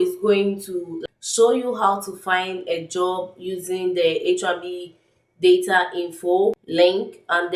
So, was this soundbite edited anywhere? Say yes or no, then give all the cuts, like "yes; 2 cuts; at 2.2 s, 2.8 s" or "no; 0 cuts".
yes; 2 cuts; at 1.0 s, 6.6 s